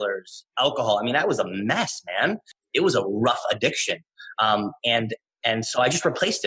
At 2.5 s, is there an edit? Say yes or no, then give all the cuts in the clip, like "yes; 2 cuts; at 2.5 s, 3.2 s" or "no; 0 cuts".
yes; 1 cut; at 2.5 s